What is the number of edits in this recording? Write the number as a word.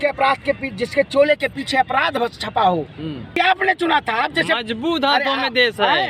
one